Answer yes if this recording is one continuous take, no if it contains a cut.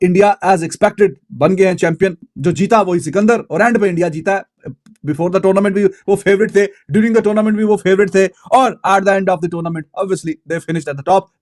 yes